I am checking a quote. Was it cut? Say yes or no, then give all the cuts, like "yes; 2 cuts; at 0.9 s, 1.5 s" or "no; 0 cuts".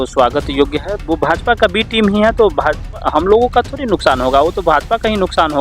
yes; 1 cut; at 1.0 s